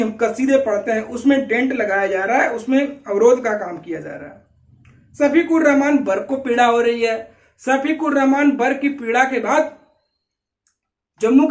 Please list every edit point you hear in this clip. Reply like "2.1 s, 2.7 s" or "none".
none